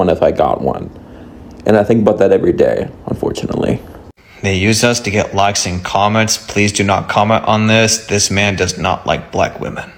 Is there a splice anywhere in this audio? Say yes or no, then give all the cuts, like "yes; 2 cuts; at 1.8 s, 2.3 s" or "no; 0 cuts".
no; 0 cuts